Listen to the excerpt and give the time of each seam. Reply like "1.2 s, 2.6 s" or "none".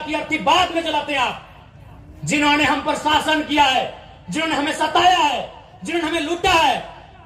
none